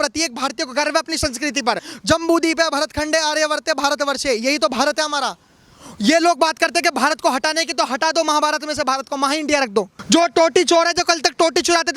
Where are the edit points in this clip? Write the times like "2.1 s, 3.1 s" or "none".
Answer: 1.9 s, 10.0 s